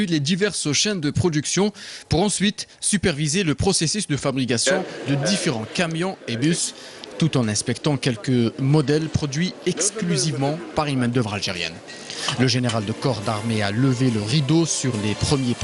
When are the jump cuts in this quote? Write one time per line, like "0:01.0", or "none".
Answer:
none